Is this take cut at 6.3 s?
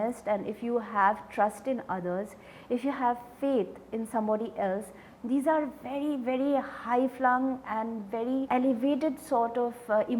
no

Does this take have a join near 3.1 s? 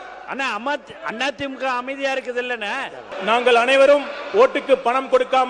yes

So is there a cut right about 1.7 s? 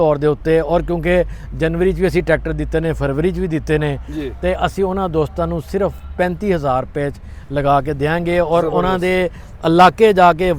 no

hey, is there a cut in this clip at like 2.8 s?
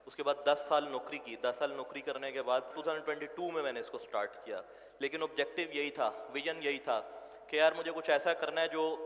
yes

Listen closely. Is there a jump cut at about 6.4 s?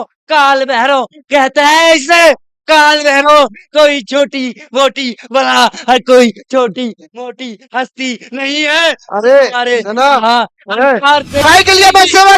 no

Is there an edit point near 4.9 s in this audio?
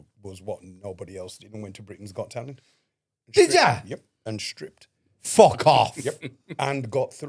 no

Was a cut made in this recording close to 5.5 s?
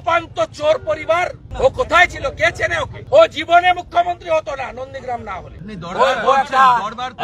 yes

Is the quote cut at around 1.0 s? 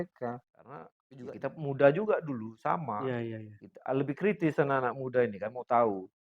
yes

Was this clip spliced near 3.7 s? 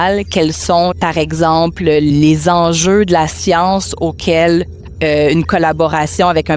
no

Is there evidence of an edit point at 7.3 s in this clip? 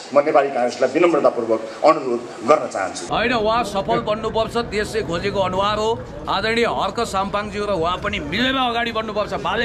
no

